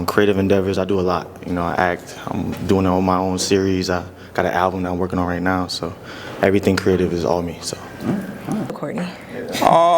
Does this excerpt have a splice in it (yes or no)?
yes